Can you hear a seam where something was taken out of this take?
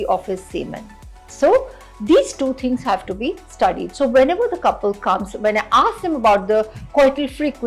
no; 0 cuts

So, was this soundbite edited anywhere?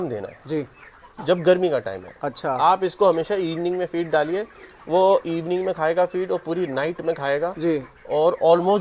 no; 0 cuts

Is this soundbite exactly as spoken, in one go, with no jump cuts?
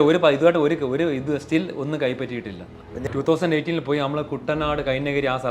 no; 1 cut; at 3.1 s

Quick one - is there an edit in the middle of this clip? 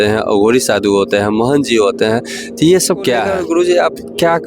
yes; 1 cut; at 3.3 s

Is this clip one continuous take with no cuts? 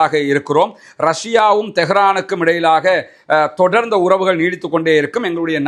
yes; 0 cuts

